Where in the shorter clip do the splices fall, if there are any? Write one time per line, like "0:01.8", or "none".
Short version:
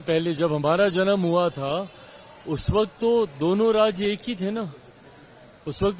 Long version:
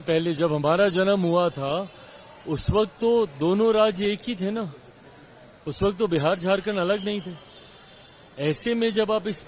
none